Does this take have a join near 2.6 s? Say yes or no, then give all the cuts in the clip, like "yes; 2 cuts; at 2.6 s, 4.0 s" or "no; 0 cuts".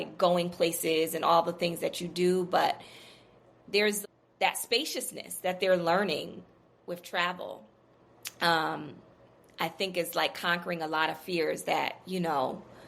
no; 1 cut; at 4.0 s